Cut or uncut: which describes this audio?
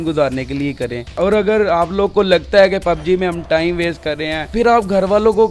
uncut